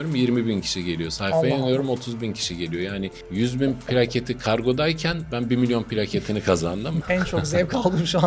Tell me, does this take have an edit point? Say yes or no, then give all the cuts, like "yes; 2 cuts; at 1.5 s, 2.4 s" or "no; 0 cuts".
yes; 2 cuts; at 3.2 s, 7.0 s